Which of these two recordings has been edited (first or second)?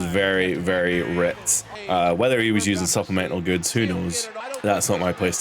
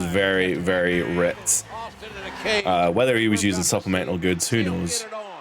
first